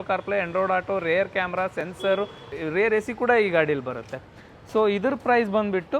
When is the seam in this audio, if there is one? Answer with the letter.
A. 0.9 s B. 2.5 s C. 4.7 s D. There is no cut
B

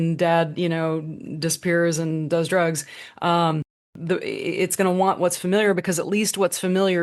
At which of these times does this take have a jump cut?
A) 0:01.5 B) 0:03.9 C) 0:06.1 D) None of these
B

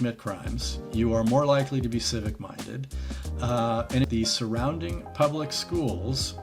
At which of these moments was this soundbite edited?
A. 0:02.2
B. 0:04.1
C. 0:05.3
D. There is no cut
B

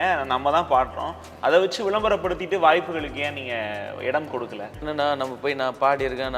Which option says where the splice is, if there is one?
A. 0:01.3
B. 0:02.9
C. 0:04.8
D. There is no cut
C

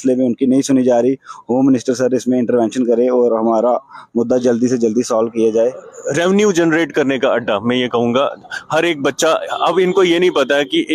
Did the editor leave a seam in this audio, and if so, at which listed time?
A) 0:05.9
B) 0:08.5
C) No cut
A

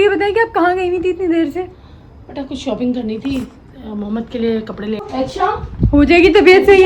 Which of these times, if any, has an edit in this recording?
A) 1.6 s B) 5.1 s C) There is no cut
B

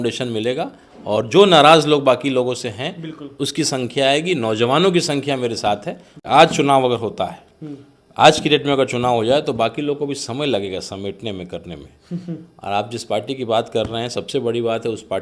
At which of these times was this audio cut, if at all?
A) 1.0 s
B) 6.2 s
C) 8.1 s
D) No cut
B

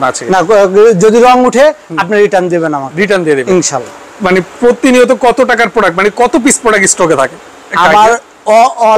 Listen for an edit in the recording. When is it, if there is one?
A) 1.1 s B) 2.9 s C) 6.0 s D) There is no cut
D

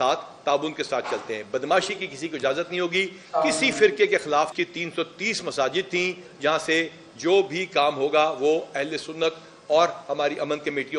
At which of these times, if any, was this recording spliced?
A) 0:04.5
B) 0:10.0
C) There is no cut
A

